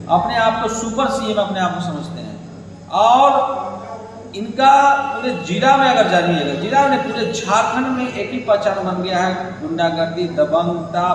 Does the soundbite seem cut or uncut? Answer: uncut